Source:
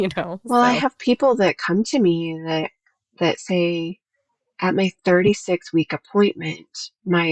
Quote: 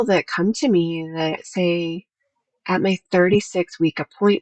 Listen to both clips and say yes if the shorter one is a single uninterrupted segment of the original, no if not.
no